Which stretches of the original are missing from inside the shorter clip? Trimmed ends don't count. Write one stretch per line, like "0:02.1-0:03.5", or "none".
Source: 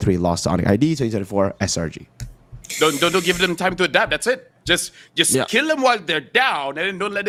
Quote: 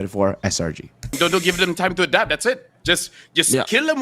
0:02.3-0:03.0